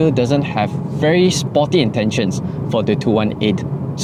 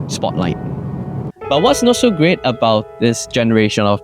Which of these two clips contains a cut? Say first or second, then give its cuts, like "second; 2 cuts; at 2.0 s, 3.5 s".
second; 1 cut; at 1.2 s